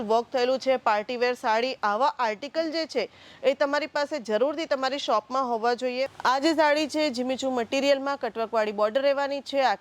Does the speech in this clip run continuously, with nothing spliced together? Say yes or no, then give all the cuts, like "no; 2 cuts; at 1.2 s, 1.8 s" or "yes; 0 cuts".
no; 1 cut; at 6.1 s